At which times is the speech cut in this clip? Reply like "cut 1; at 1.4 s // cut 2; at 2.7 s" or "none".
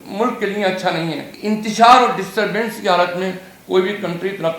cut 1; at 1.3 s